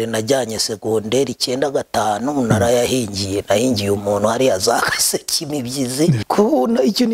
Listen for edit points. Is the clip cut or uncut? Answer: cut